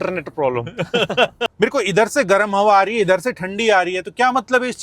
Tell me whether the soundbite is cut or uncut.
cut